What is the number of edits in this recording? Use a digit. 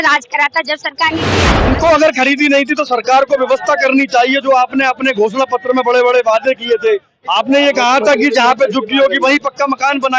1